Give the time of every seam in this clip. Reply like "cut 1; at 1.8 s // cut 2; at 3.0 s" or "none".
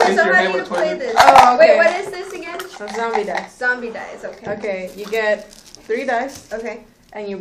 none